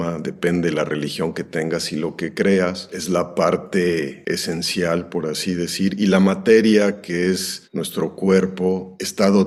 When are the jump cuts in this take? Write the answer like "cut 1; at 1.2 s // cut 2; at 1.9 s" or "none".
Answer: none